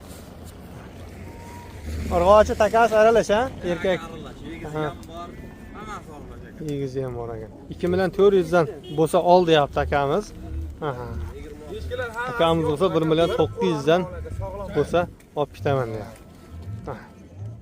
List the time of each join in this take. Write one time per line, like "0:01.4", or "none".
0:01.8
0:07.6